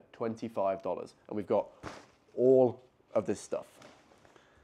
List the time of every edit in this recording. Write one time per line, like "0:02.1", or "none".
none